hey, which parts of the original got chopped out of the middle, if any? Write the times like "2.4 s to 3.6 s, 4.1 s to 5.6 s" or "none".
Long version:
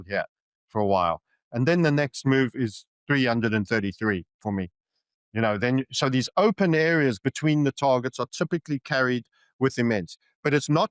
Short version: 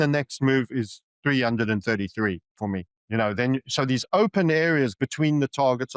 4.8 s to 5.2 s